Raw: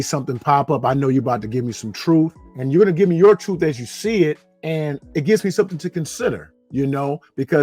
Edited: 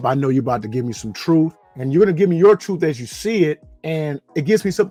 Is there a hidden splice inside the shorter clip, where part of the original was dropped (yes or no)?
no